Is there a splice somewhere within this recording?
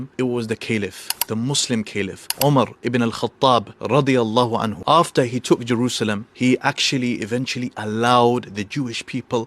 no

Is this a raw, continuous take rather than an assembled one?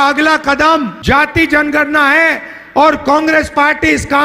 no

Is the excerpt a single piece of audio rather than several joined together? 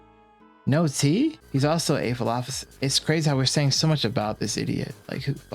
no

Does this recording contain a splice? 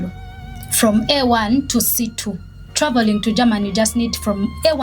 yes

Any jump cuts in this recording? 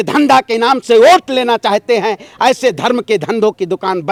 no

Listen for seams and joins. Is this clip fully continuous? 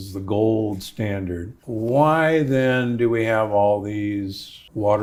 yes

